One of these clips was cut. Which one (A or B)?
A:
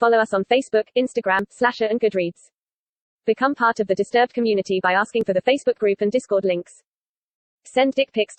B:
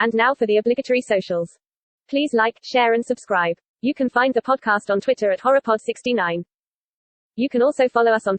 B